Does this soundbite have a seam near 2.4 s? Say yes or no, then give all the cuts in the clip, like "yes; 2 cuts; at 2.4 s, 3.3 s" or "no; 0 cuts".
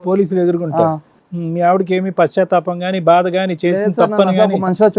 no; 1 cut; at 1.1 s